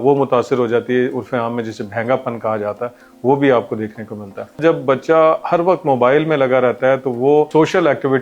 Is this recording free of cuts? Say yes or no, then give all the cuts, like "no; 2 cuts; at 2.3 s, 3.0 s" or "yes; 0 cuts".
no; 2 cuts; at 4.6 s, 7.5 s